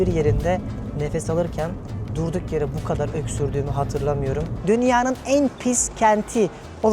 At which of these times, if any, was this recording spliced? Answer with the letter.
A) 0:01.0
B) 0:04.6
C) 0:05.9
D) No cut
B